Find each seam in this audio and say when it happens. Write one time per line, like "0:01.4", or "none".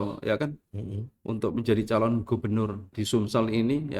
0:03.0